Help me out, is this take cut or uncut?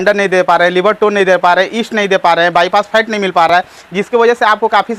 uncut